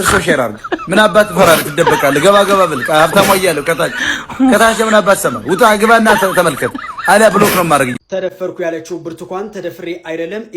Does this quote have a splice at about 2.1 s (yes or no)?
no